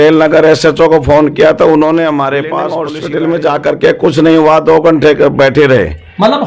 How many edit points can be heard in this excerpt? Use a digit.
1